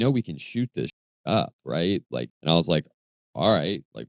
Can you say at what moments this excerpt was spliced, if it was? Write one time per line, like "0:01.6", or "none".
0:00.9
0:02.3